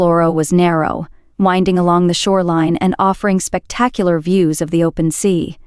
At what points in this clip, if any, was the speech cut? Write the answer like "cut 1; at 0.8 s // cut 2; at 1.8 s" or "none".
none